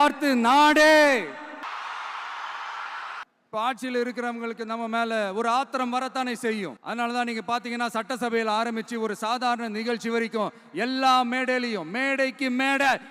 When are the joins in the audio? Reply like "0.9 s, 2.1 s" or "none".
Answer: 1.6 s, 3.2 s, 6.8 s